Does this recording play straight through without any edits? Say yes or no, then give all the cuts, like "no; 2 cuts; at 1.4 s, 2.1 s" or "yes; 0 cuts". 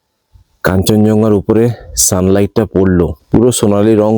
no; 1 cut; at 3.2 s